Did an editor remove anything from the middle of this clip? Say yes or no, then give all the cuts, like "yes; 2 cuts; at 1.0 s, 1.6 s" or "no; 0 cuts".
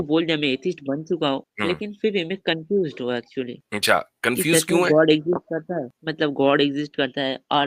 yes; 3 cuts; at 1.5 s, 3.6 s, 6.0 s